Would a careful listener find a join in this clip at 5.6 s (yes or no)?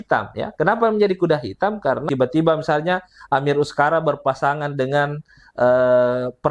no